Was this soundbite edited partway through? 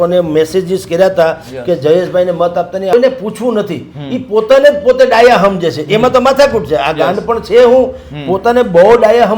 yes; 1 cut; at 2.9 s

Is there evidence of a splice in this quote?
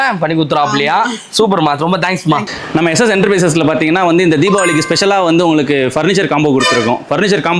yes; 1 cut; at 2.6 s

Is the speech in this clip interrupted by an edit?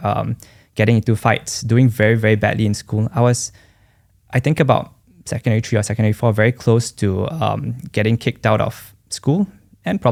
no; 0 cuts

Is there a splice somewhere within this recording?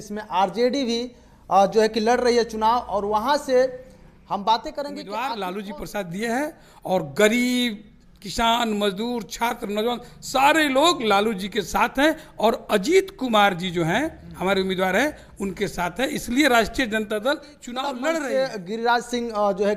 yes; 2 cuts; at 5.0 s, 18.0 s

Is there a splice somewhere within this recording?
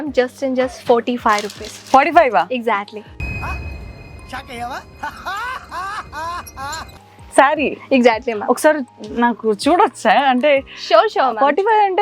no; 0 cuts

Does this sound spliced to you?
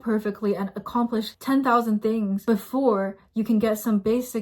no; 0 cuts

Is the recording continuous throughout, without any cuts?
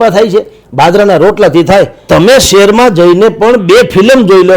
no; 1 cut; at 2.0 s

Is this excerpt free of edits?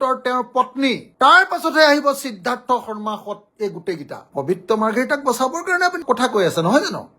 no; 1 cut; at 1.1 s

